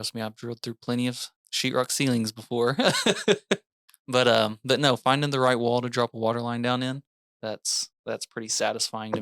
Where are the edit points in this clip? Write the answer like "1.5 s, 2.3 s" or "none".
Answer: 5.0 s